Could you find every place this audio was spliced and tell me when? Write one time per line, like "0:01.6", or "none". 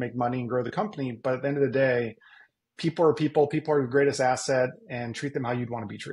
none